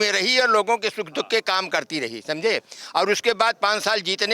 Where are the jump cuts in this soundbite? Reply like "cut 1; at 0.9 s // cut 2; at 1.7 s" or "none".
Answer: none